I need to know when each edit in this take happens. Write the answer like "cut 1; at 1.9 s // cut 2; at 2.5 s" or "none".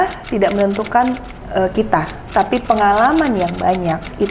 none